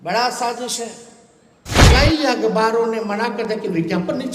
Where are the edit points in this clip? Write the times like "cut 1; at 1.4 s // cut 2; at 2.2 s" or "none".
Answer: cut 1; at 1.7 s